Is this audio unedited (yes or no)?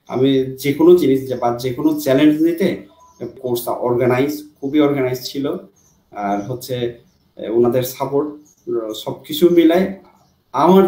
no